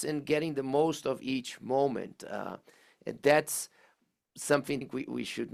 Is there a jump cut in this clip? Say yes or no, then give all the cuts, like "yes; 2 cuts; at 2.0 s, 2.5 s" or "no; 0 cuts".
no; 0 cuts